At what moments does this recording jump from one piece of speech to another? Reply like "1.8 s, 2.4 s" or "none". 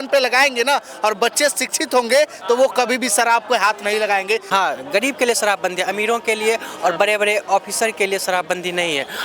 4.4 s